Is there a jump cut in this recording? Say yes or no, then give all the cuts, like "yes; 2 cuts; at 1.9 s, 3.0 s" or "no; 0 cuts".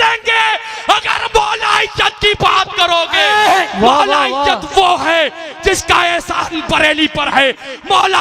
no; 0 cuts